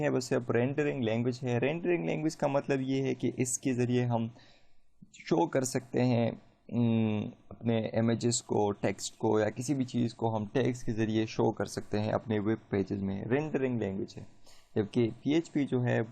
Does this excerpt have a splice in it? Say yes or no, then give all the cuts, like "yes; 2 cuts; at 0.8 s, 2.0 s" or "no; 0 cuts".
yes; 1 cut; at 2.8 s